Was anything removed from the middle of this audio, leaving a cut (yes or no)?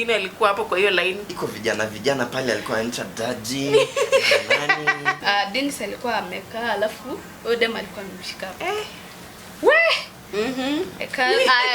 yes